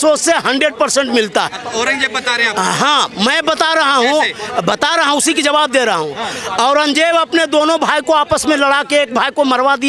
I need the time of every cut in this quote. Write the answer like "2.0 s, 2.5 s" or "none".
none